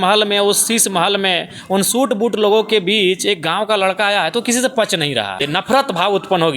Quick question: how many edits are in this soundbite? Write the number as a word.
one